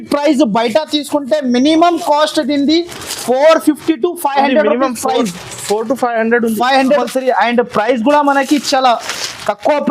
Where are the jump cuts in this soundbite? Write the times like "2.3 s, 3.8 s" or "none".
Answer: 7.0 s